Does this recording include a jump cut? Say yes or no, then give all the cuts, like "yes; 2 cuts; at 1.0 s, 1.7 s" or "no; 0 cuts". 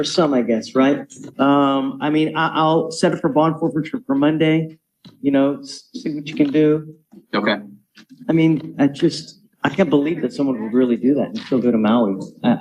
no; 0 cuts